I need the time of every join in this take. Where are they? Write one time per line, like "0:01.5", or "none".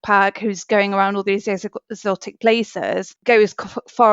0:03.1